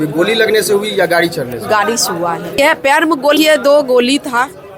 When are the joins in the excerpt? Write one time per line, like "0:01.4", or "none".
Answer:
0:03.4